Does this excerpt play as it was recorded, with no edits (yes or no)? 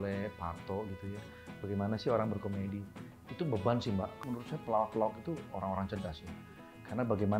no